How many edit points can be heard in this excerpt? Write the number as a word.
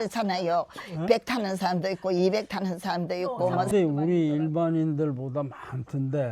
one